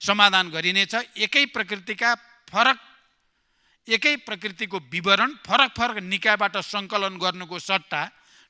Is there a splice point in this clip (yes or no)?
no